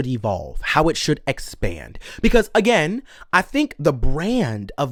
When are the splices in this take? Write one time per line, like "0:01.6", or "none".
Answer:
none

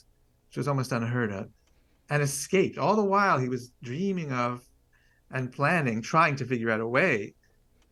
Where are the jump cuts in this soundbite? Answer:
none

